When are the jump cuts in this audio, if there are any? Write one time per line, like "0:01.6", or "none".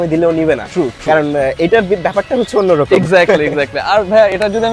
none

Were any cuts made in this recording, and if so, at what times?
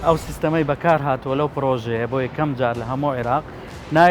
none

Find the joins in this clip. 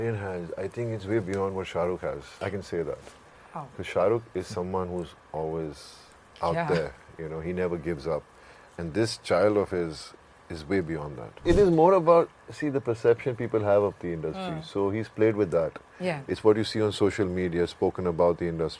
0:02.4
0:11.4

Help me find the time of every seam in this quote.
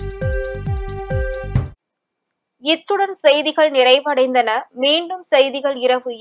none

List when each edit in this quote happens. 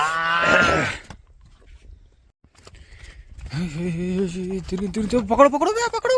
0:02.3

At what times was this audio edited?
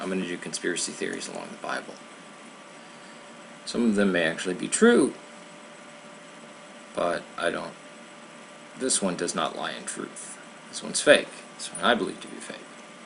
none

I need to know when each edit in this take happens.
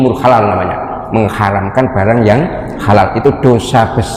none

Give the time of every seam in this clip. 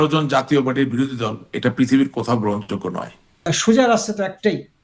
0:03.5

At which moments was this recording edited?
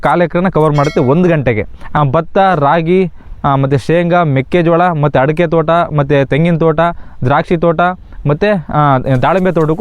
0:01.8

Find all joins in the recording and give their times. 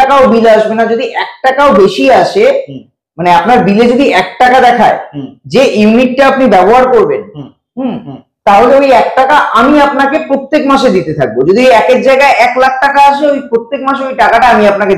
none

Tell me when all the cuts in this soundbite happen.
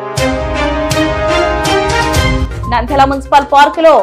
0:02.4

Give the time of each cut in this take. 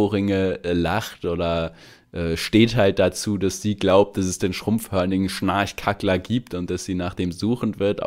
none

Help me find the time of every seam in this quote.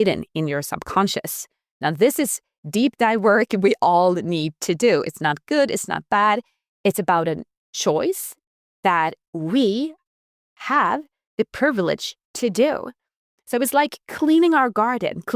none

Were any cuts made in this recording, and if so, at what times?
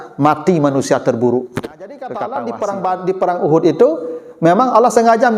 0:02.1

